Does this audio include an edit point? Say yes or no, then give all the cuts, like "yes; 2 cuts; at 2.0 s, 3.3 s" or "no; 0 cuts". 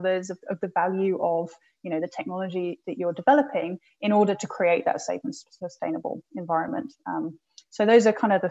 no; 0 cuts